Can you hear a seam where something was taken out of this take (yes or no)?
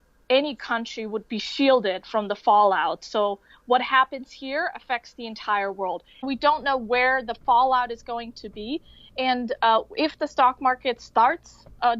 yes